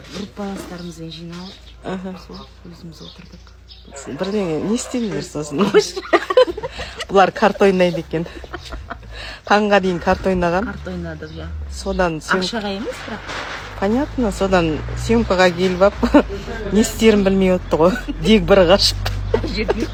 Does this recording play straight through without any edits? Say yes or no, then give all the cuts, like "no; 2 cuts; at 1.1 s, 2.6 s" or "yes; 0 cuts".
yes; 0 cuts